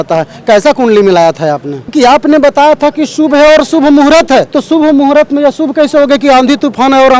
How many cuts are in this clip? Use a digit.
2